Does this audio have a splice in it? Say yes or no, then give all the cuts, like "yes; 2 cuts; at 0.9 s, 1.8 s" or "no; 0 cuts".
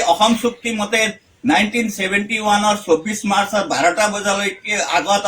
yes; 1 cut; at 3.9 s